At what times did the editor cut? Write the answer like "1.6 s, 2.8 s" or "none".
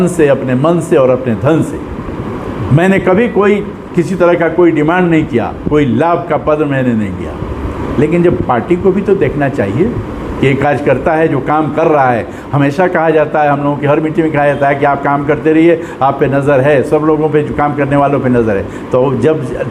none

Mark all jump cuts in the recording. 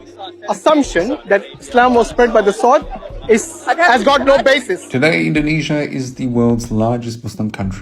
4.8 s

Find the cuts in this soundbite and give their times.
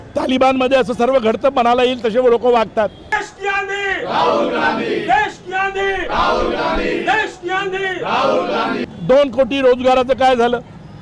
3.3 s, 8.8 s

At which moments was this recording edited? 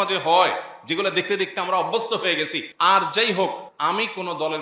2.6 s, 3.7 s

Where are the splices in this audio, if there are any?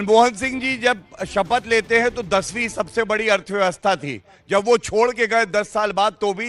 none

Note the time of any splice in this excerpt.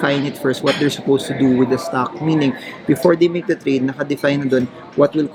none

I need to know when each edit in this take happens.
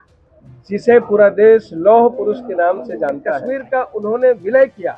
3.4 s

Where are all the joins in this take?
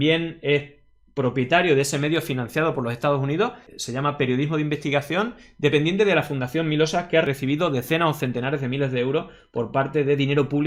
none

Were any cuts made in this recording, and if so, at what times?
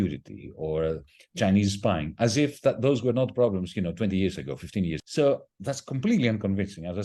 5.0 s

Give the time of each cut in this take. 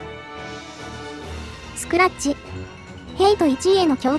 1.9 s

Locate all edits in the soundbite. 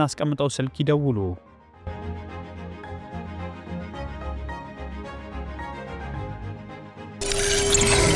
7.2 s

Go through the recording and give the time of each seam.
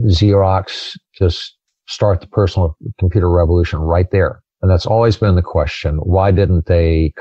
4.5 s

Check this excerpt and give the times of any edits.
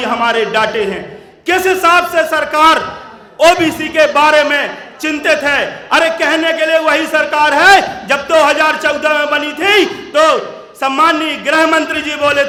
none

